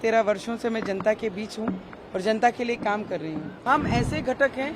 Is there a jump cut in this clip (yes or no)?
yes